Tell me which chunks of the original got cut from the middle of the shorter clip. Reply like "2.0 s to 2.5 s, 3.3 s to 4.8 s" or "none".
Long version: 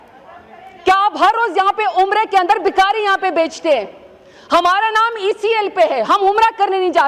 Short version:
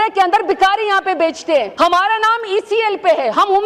3.9 s to 4.4 s